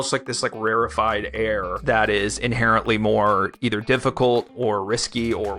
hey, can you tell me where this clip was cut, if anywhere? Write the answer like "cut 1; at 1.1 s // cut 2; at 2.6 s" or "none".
none